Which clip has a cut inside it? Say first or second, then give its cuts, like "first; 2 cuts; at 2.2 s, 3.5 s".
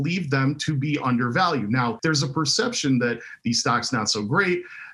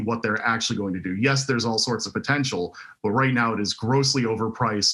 first; 1 cut; at 2.0 s